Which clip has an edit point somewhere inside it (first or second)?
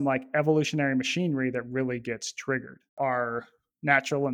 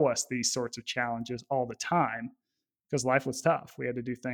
first